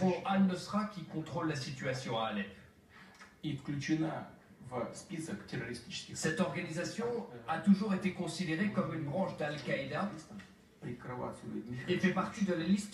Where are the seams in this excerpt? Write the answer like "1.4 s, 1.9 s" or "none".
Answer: 7.8 s